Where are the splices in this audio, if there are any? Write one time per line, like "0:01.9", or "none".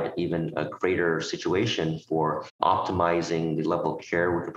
0:02.5